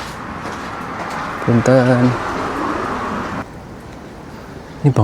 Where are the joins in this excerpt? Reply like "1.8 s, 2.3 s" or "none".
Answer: 3.5 s